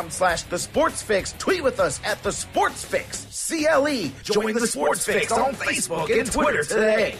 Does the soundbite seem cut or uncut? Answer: uncut